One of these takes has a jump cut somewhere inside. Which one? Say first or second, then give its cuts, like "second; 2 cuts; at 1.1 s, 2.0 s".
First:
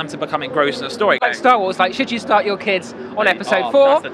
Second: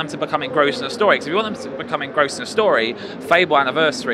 first; 1 cut; at 1.2 s